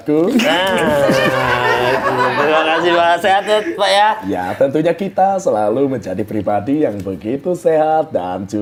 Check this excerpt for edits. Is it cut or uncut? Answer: uncut